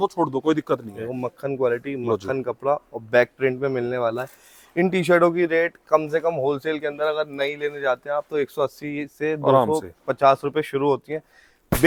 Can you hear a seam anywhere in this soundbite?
no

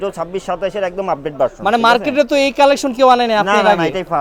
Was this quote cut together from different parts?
no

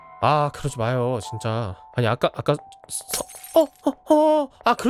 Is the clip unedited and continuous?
no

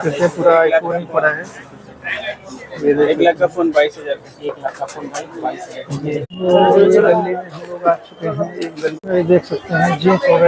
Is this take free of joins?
no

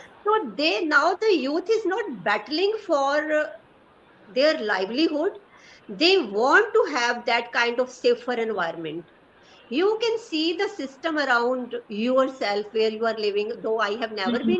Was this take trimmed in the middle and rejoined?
no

